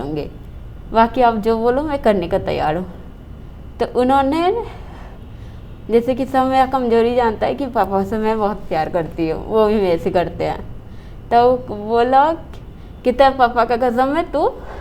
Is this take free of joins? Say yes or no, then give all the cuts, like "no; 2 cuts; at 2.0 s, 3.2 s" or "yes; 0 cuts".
yes; 0 cuts